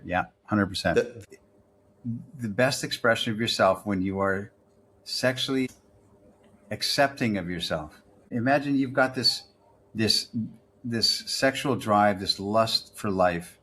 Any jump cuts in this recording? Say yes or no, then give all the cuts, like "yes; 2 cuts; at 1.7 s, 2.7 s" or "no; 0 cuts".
yes; 3 cuts; at 1.2 s, 5.7 s, 8.3 s